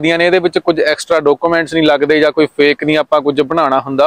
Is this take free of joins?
yes; 0 cuts

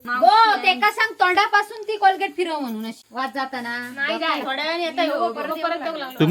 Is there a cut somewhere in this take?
yes; 1 cut; at 2.9 s

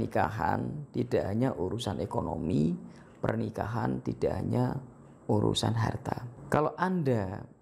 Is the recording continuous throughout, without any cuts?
no; 1 cut; at 6.3 s

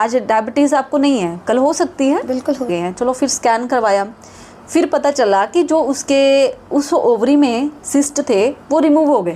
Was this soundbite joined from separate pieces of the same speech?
yes; 1 cut; at 2.7 s

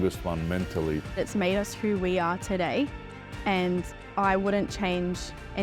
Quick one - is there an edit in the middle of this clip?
no; 0 cuts

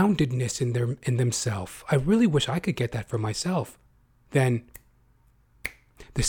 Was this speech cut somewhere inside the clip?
no; 0 cuts

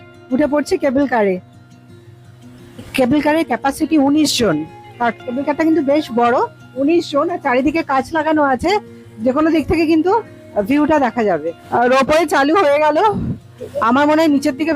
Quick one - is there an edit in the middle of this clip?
no; 0 cuts

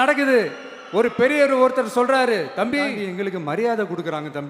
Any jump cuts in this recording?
yes; 1 cut; at 3.0 s

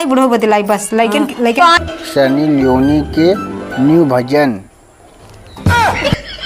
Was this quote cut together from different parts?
yes; 1 cut; at 1.8 s

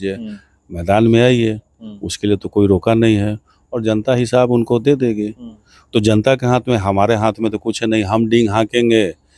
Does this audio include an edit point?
no; 0 cuts

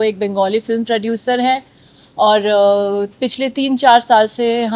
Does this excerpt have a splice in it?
no; 0 cuts

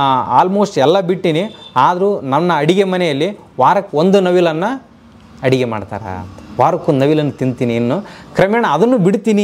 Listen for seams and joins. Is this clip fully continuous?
yes; 0 cuts

